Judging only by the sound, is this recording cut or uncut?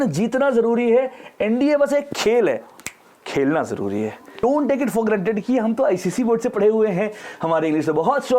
cut